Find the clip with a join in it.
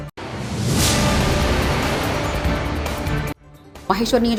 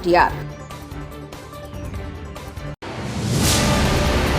second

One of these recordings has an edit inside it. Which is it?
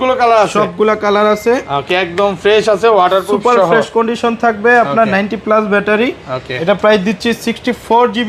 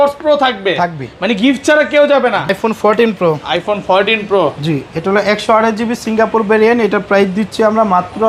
second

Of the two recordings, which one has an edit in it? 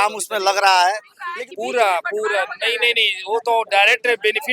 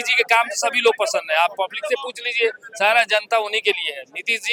first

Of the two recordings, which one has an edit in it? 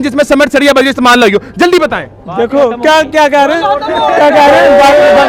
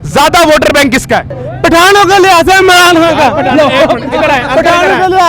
second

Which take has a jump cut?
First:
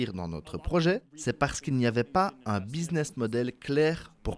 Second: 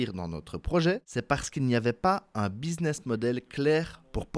second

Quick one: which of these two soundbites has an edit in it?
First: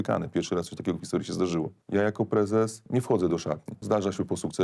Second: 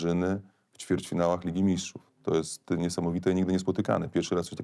first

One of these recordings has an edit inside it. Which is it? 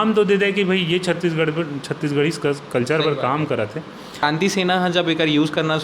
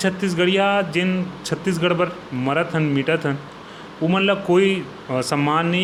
first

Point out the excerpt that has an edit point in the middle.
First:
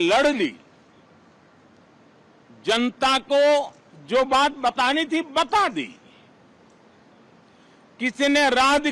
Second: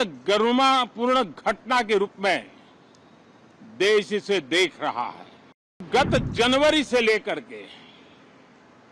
second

